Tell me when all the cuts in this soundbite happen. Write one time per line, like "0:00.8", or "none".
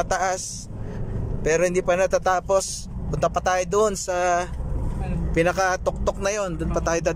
none